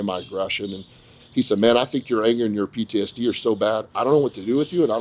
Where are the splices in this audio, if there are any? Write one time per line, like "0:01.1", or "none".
none